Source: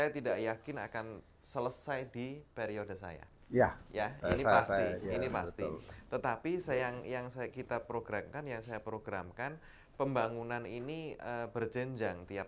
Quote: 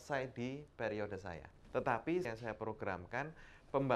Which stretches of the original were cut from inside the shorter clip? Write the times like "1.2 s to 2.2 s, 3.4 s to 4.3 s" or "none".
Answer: 3.3 s to 5.9 s, 6.6 s to 8.5 s